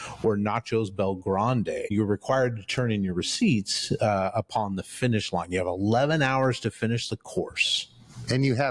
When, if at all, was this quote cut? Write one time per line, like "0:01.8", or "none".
0:01.9